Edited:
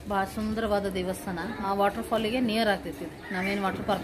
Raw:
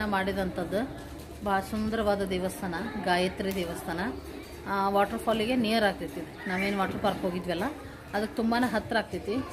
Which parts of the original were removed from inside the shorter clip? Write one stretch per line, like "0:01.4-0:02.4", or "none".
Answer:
0:03.0-0:04.8

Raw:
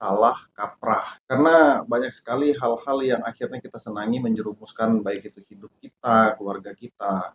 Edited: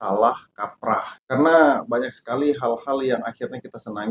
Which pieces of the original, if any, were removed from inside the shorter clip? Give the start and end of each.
none

